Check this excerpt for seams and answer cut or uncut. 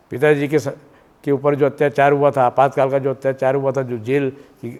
uncut